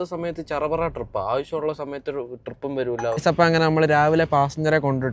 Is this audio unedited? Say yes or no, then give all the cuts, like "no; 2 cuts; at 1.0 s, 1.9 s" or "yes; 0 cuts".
no; 1 cut; at 3.2 s